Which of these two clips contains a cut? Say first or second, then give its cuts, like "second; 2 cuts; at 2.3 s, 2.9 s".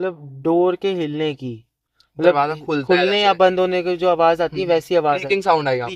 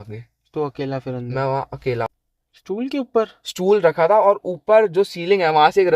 second; 1 cut; at 2.1 s